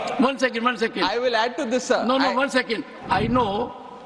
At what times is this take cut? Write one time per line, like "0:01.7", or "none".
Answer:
0:02.9